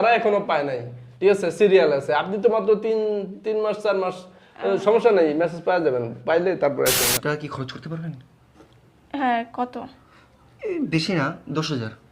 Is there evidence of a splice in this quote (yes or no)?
yes